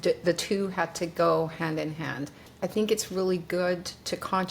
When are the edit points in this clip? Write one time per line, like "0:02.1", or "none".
0:02.5